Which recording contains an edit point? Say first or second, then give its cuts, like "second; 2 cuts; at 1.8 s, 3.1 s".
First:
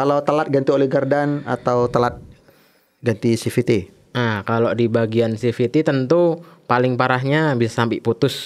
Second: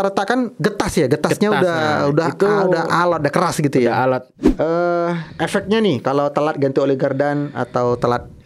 second; 1 cut; at 4.3 s